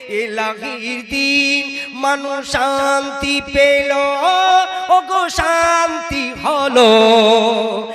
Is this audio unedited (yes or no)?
yes